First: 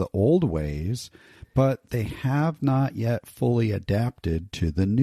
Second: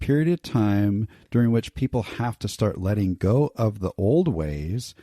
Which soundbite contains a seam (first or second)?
second